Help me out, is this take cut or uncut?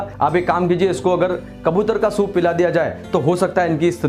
uncut